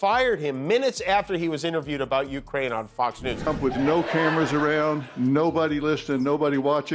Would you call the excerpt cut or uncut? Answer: cut